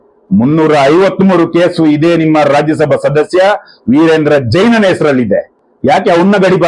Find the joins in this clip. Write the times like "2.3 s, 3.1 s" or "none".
none